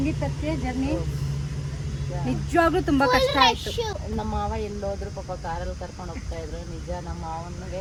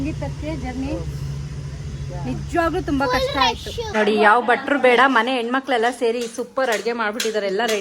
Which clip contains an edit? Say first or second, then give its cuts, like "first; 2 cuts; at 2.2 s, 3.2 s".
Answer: second; 1 cut; at 3.8 s